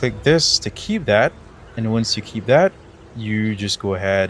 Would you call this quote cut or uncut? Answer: uncut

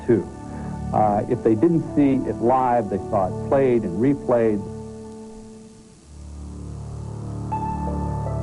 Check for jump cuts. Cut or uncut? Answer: cut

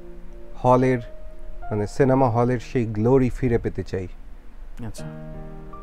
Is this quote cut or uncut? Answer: uncut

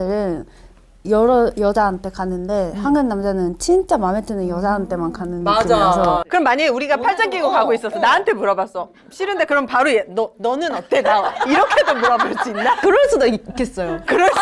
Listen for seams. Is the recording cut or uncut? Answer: cut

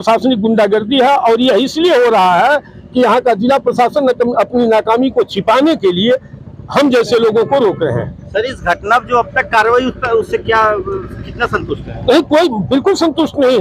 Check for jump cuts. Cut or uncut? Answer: uncut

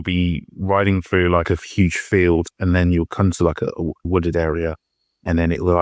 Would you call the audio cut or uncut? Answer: cut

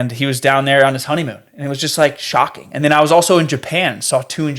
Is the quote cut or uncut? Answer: uncut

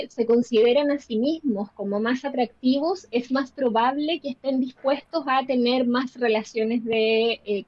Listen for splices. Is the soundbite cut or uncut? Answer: uncut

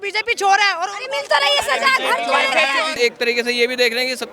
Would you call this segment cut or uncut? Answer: cut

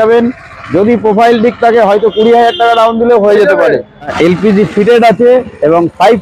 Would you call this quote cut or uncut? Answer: cut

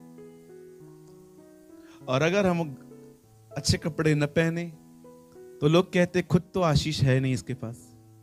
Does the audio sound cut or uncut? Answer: uncut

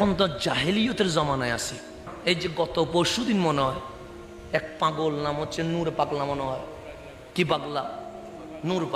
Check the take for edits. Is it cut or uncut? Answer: uncut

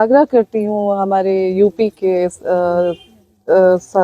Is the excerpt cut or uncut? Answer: uncut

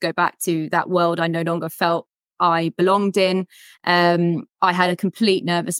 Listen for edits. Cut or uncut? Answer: uncut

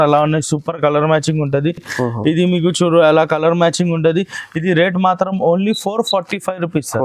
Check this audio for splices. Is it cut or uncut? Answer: uncut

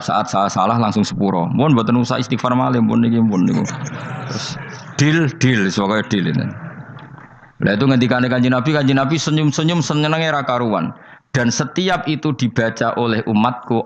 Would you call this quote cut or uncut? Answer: uncut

